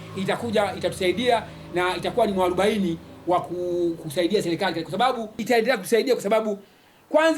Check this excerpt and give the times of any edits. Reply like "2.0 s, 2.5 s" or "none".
5.4 s